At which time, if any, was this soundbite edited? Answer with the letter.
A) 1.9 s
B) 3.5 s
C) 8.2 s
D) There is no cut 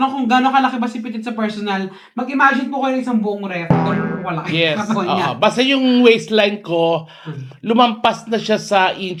D